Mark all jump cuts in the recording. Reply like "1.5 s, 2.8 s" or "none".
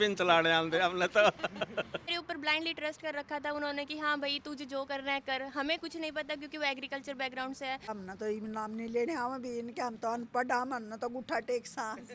2.1 s, 7.9 s